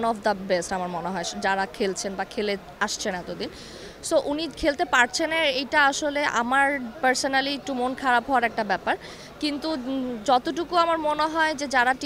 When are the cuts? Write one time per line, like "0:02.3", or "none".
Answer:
none

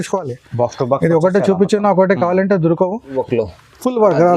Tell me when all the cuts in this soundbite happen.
0:03.2

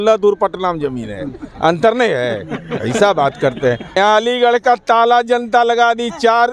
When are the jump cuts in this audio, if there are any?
0:04.0

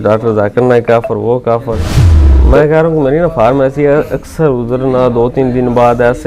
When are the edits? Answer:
0:02.0

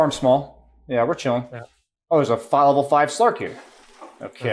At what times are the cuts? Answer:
none

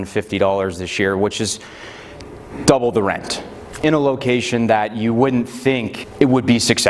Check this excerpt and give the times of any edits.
0:03.8
0:06.0

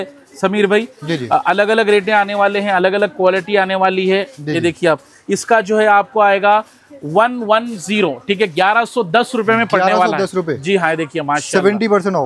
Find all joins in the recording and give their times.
none

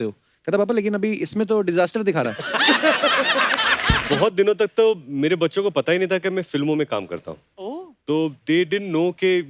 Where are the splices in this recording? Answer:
0:04.0

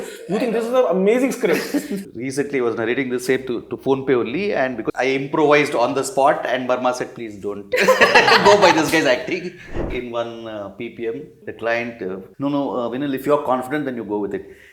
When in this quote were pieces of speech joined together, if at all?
0:02.0
0:04.8
0:10.0
0:11.4
0:12.3

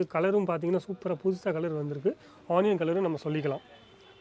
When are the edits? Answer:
none

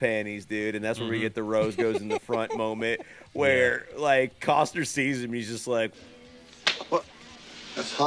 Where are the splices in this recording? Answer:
none

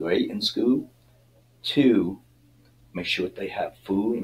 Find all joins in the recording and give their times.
none

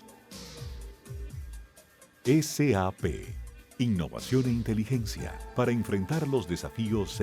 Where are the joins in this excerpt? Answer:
0:01.2

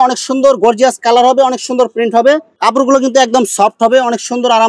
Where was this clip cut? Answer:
0:02.5

